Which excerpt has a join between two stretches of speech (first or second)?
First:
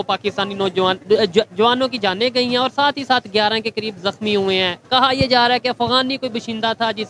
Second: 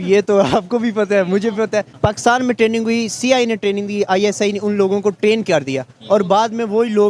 second